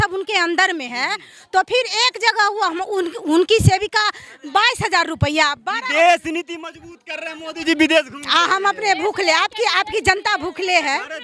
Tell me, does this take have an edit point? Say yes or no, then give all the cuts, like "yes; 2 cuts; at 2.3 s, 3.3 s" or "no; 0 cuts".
no; 0 cuts